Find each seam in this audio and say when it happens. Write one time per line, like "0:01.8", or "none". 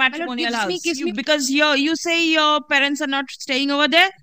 0:01.1